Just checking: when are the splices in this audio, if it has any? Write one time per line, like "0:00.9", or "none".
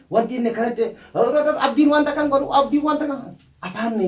none